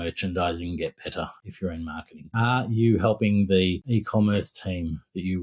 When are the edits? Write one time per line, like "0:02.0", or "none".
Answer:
0:01.6
0:03.8